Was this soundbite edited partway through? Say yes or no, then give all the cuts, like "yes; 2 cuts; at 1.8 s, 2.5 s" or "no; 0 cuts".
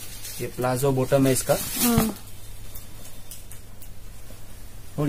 no; 0 cuts